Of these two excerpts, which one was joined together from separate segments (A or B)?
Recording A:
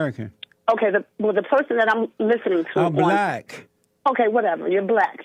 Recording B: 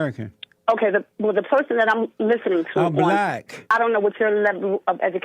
B